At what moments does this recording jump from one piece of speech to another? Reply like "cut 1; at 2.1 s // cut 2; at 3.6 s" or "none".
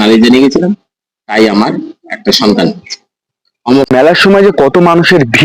cut 1; at 3.9 s